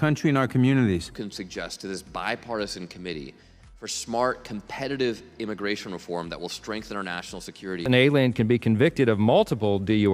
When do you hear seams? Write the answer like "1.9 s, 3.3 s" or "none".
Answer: 1.1 s, 7.8 s

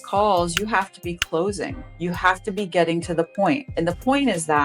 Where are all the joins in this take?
1.8 s, 3.7 s

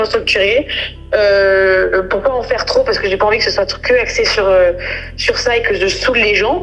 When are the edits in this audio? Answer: none

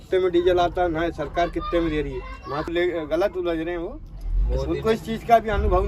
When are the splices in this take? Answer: 2.7 s

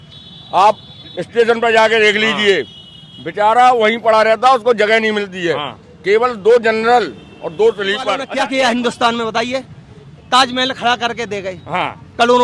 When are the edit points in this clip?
8.3 s

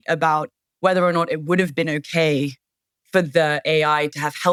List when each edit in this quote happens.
none

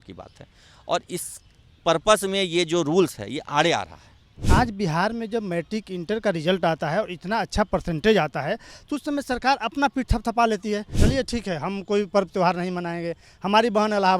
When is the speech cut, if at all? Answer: 4.3 s, 10.9 s

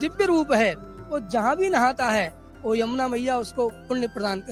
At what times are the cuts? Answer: none

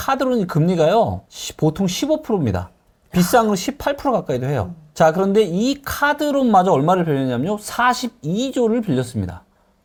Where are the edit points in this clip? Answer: none

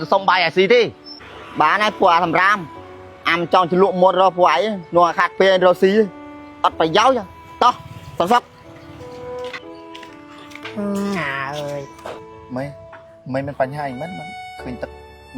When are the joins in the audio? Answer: 12.2 s

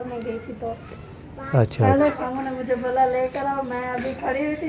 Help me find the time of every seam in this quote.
2.2 s

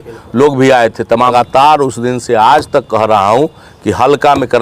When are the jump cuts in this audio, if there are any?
1.3 s

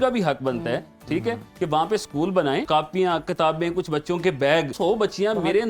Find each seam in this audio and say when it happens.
2.7 s, 4.7 s

